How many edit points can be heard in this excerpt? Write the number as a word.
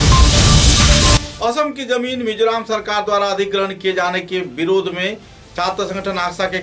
zero